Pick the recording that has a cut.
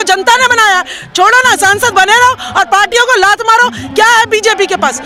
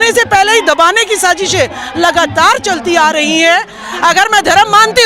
second; 1 cut; at 3.8 s

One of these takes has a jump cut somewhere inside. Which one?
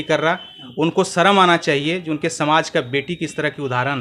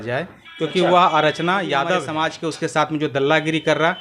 second; 1 cut; at 2.1 s

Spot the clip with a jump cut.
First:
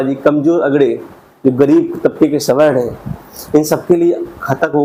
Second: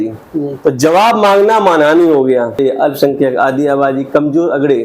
second; 1 cut; at 2.6 s

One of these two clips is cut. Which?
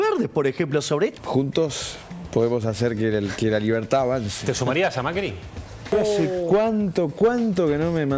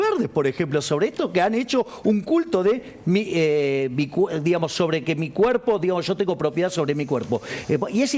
first; 2 cuts; at 1.1 s, 5.9 s

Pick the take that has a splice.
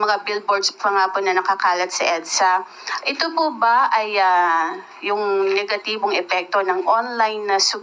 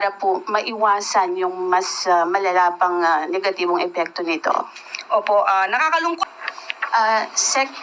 second; 1 cut; at 6.3 s

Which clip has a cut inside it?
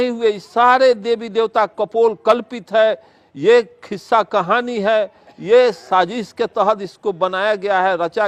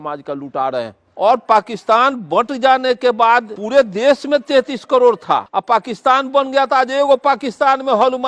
second; 3 cuts; at 1.0 s, 3.6 s, 5.5 s

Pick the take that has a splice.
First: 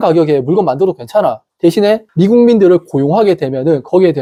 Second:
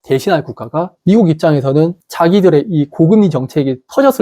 second; 1 cut; at 0.9 s

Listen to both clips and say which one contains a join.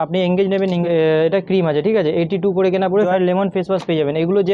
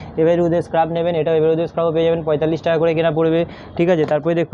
first; 2 cuts; at 0.8 s, 3.1 s

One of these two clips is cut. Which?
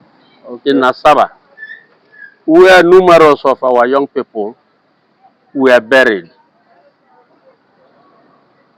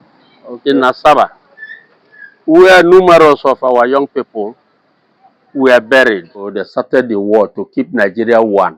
second; 1 cut; at 6.6 s

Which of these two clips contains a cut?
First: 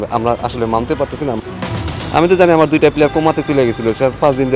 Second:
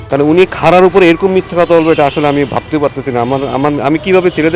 first; 1 cut; at 1.8 s

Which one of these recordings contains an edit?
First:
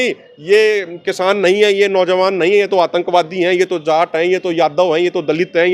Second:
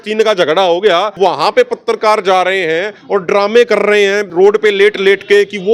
second; 2 cuts; at 1.1 s, 4.2 s

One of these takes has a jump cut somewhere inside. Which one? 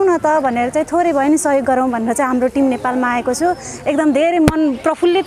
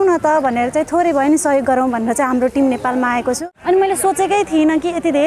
second; 1 cut; at 3.4 s

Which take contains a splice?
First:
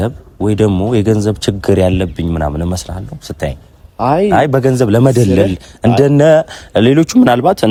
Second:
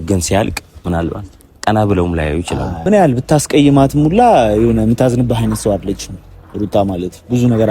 second; 1 cut; at 2.8 s

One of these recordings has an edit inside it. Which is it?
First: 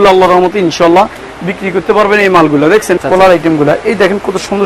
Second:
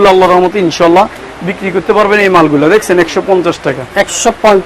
first; 1 cut; at 3.0 s

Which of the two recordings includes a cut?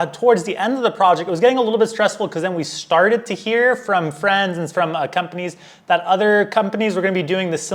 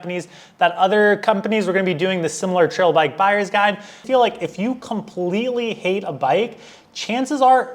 second; 1 cut; at 4.0 s

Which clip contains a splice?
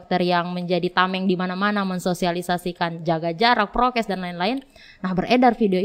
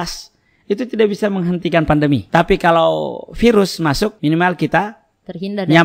second; 2 cuts; at 2.2 s, 4.2 s

